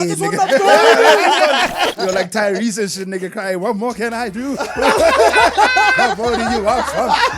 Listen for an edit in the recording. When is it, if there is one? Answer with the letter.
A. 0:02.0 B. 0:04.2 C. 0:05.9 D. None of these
A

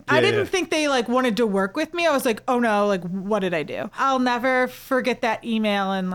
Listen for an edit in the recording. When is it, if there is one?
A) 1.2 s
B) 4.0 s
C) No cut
B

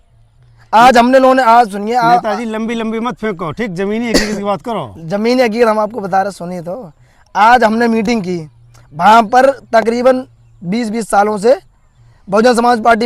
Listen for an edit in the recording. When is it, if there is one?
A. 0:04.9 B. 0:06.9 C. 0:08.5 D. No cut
D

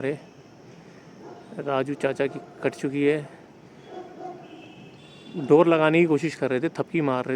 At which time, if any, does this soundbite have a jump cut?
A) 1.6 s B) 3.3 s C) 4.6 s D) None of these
D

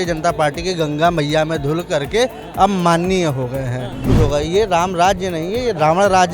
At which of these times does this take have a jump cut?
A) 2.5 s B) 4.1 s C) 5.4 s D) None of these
B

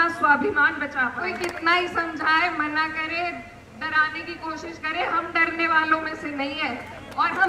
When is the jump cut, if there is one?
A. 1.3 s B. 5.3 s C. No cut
A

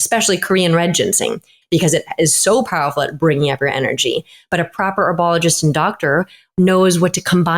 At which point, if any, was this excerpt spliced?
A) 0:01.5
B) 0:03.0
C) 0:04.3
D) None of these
A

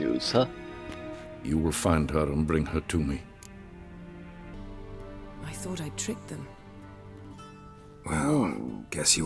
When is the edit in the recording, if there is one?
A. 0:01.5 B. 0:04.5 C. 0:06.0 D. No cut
B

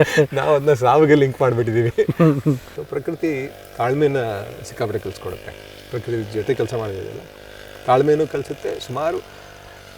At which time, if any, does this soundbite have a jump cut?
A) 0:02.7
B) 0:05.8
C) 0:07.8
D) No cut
A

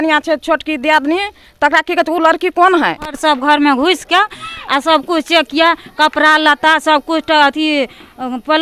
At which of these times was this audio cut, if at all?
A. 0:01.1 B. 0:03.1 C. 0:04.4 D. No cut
B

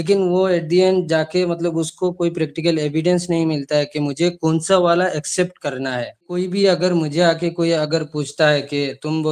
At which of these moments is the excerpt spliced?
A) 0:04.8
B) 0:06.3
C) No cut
B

